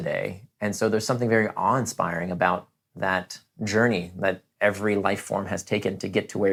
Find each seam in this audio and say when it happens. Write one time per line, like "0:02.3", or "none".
none